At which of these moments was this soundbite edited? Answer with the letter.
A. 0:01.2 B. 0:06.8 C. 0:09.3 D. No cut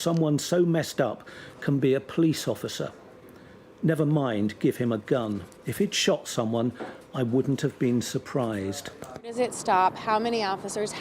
C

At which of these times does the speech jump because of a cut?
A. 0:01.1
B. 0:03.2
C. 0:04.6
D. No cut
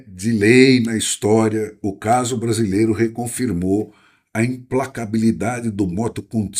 D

